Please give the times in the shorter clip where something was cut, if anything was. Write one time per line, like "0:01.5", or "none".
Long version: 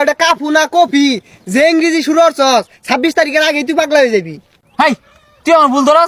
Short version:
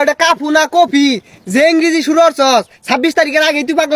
none